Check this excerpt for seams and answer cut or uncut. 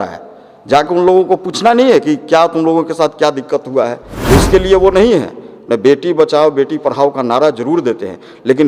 cut